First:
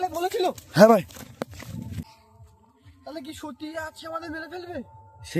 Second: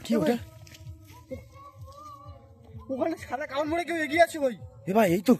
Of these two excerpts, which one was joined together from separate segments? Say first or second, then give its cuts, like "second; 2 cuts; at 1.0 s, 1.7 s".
first; 1 cut; at 2.2 s